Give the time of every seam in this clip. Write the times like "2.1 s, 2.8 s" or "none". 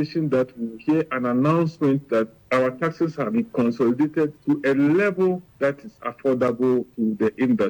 4.4 s, 5.6 s, 6.9 s